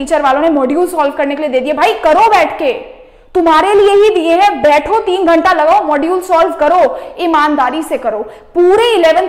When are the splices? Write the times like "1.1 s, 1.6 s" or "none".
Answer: none